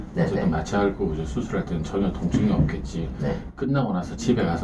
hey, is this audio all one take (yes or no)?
yes